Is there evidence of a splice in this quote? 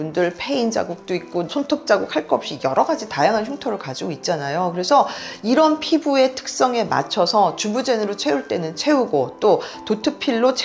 yes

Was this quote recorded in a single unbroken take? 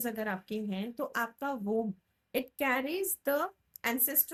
yes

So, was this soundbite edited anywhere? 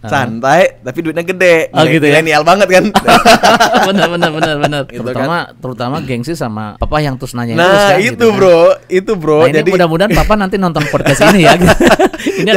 yes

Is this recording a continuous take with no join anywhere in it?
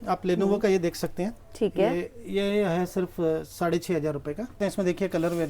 no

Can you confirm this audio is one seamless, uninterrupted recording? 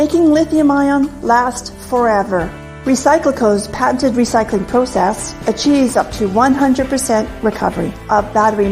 no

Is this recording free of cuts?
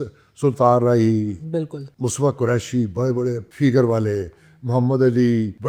yes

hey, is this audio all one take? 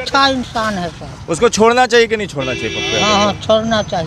yes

